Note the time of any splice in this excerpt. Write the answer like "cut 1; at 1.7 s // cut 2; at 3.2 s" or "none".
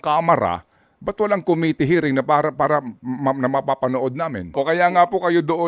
cut 1; at 4.5 s